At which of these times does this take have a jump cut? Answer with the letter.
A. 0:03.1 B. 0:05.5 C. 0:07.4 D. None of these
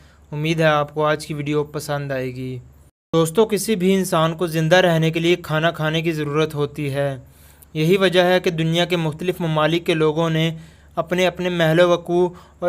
A